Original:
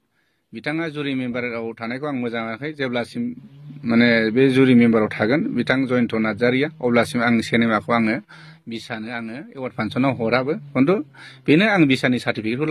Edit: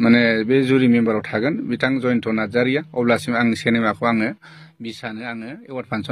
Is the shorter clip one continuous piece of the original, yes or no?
yes